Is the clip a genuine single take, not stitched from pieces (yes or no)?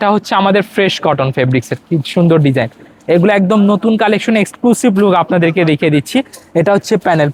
yes